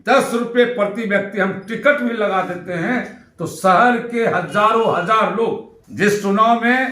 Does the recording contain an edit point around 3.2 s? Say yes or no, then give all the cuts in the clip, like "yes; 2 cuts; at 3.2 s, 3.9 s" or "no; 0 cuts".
no; 1 cut; at 5.8 s